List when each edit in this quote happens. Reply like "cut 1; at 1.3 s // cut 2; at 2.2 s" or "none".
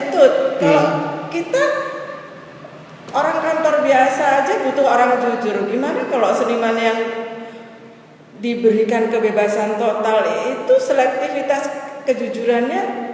none